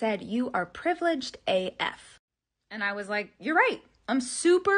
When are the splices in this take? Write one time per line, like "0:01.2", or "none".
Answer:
none

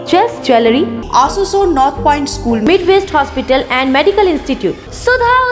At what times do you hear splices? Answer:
0:01.0

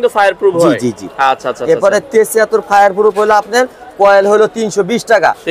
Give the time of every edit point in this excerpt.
none

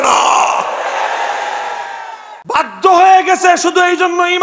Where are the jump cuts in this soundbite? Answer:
0:02.6

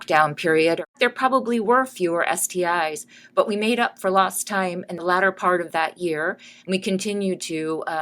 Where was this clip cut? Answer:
0:00.9
0:04.9

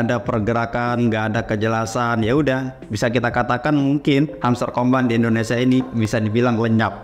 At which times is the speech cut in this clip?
none

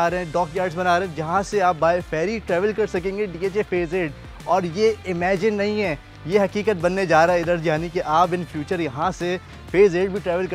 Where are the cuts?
none

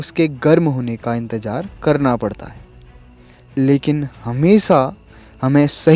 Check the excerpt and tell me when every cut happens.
none

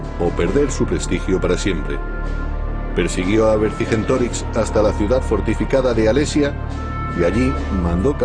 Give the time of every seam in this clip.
0:05.7

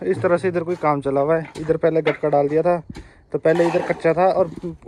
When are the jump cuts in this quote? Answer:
none

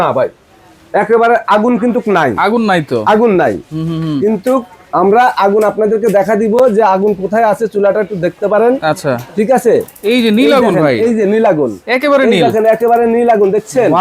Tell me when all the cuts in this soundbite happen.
none

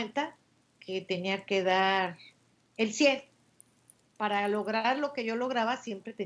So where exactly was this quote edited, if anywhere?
none

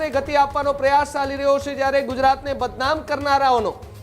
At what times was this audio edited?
none

